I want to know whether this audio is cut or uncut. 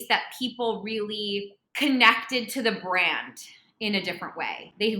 cut